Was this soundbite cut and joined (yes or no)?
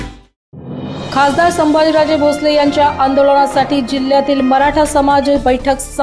yes